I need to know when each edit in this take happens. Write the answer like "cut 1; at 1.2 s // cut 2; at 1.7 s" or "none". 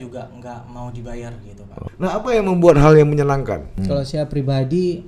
cut 1; at 1.9 s // cut 2; at 3.7 s